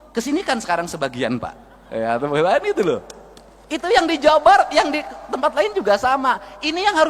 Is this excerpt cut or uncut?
uncut